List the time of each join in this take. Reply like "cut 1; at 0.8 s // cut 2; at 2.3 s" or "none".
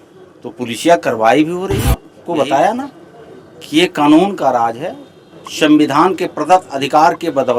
cut 1; at 2.1 s